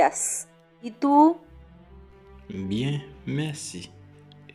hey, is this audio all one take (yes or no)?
yes